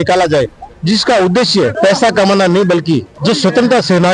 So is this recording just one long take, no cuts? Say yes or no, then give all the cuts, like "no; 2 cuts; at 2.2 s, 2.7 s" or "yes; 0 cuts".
no; 2 cuts; at 1.7 s, 3.1 s